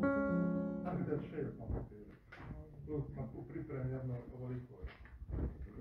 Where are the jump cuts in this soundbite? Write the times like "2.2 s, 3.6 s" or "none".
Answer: 0.9 s